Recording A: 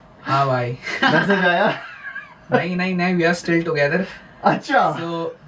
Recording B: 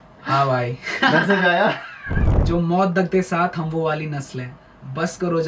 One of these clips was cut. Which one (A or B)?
B